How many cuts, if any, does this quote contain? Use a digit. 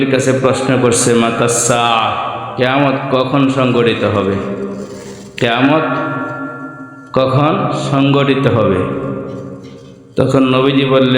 1